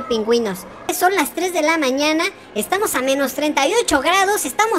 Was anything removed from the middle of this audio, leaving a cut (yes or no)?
yes